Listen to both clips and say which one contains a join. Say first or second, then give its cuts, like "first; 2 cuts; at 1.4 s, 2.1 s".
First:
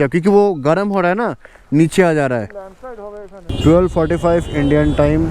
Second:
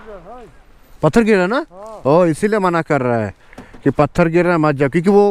first; 1 cut; at 3.5 s